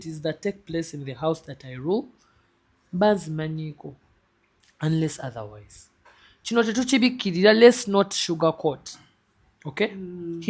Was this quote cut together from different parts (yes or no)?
no